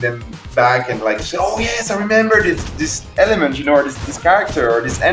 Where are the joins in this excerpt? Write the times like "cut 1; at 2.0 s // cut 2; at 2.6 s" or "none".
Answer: none